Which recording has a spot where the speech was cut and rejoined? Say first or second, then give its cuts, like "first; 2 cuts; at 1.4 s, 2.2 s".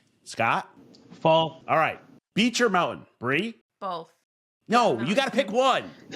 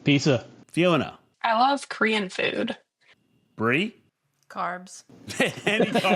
first; 1 cut; at 1.6 s